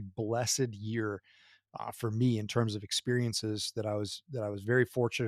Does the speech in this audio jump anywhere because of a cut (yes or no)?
no